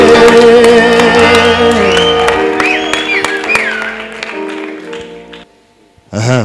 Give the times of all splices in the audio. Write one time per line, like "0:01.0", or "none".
0:05.5